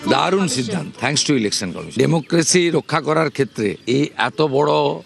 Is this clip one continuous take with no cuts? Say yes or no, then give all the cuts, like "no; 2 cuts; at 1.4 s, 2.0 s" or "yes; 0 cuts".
no; 1 cut; at 0.9 s